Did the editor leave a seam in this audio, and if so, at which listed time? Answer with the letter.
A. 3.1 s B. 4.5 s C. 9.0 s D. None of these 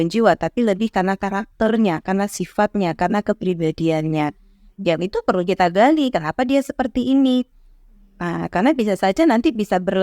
D